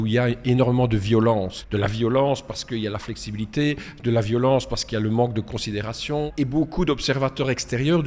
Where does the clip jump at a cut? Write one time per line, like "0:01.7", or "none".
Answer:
0:01.6
0:06.3